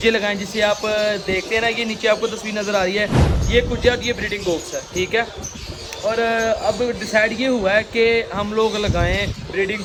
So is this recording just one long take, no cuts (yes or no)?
yes